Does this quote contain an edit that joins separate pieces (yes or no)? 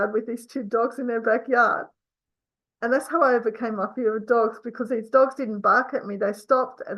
no